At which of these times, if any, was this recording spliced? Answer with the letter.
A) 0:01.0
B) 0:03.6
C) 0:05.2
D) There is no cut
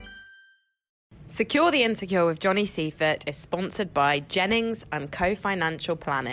A